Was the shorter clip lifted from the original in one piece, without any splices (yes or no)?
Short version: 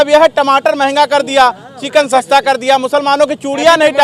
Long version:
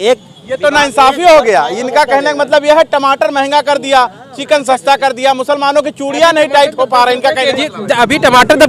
yes